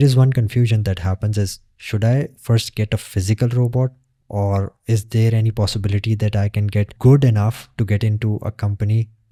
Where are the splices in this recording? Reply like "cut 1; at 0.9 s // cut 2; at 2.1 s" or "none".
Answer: none